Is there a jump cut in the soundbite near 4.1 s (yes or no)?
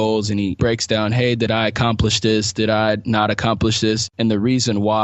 yes